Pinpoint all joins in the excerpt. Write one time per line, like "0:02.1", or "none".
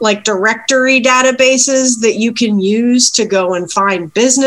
none